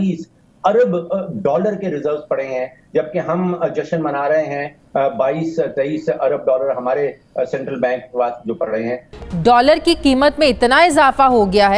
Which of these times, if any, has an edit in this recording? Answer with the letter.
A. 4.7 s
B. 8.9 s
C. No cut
B